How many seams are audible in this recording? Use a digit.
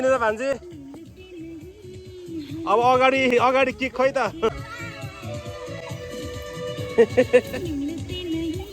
1